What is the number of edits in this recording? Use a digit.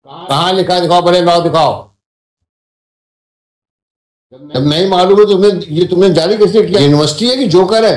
1